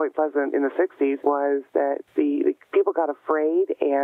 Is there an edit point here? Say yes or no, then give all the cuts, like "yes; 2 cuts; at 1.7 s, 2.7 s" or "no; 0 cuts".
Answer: yes; 2 cuts; at 1.2 s, 2.0 s